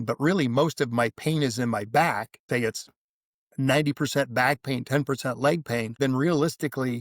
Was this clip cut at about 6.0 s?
yes; 2 cuts; at 2.4 s, 6.0 s

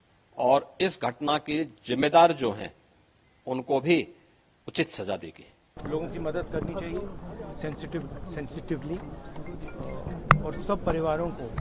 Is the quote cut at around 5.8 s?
yes; 1 cut; at 5.8 s

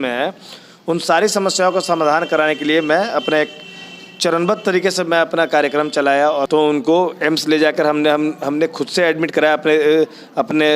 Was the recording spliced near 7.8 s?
no; 1 cut; at 6.5 s

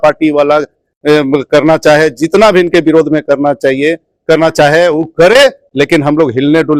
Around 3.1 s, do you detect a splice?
no; 0 cuts

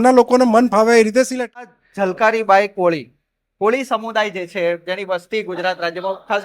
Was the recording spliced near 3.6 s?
no; 1 cut; at 1.6 s

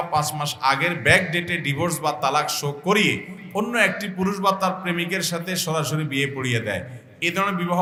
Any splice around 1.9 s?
no; 0 cuts

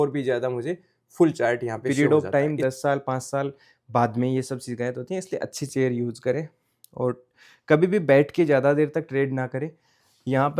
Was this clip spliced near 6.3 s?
no; 1 cut; at 1.9 s

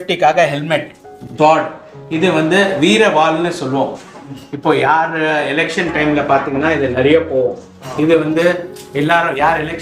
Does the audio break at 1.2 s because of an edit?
yes; 1 cut; at 1.2 s

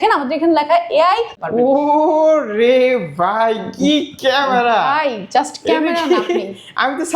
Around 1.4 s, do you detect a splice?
yes; 1 cut; at 1.4 s

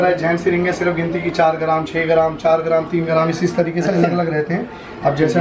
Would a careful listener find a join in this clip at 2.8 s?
no; 0 cuts

